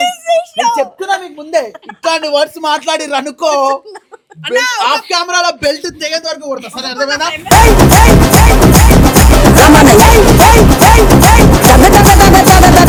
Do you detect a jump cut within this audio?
no; 0 cuts

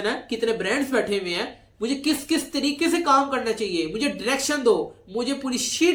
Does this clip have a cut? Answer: no; 0 cuts

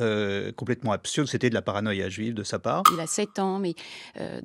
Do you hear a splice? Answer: yes; 1 cut; at 2.9 s

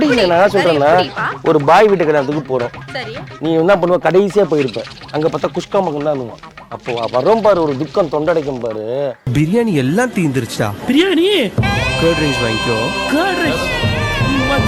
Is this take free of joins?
yes; 0 cuts

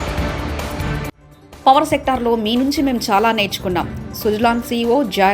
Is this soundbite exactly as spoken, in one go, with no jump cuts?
no; 1 cut; at 1.3 s

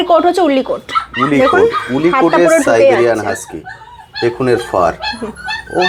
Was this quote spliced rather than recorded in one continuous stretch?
no; 0 cuts

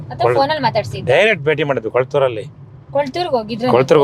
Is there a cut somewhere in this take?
no; 0 cuts

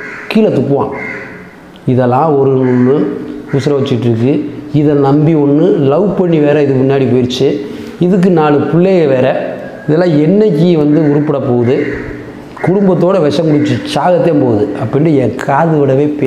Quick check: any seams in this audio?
no; 0 cuts

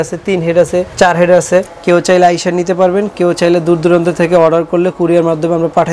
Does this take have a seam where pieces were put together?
yes; 2 cuts; at 0.9 s, 1.7 s

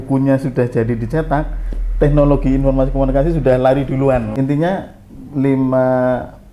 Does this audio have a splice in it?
yes; 1 cut; at 4.3 s

